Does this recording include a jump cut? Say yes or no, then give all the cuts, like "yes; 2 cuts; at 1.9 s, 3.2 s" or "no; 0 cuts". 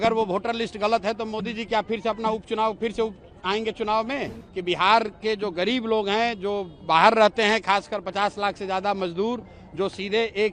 yes; 1 cut; at 4.4 s